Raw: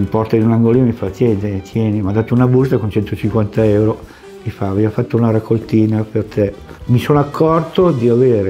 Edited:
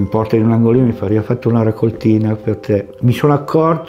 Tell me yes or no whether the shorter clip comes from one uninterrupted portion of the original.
no